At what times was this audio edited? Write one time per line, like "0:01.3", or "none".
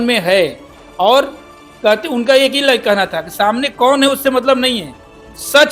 none